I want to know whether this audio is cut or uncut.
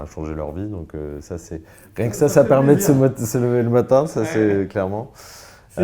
uncut